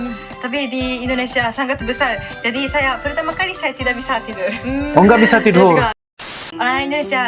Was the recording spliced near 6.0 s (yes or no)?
yes